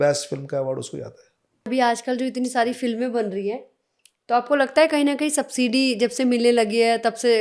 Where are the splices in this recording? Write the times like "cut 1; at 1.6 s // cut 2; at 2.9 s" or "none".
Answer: cut 1; at 1.7 s